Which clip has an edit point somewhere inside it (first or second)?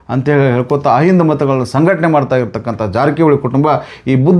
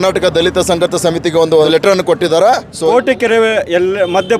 second